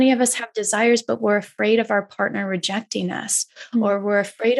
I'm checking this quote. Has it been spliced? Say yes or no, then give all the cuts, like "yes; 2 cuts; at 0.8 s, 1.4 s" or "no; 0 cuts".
no; 0 cuts